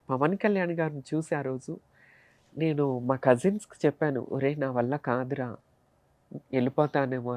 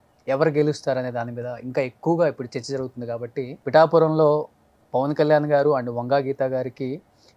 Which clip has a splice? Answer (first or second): second